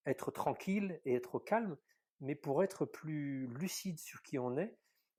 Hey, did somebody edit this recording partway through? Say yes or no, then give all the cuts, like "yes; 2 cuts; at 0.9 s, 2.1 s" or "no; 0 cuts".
no; 0 cuts